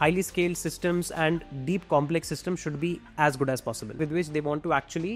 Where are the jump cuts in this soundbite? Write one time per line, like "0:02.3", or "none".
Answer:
0:04.0